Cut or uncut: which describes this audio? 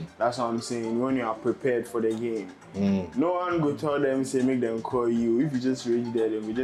uncut